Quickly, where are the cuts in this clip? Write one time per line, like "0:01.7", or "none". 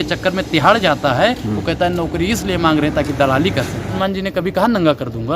0:03.9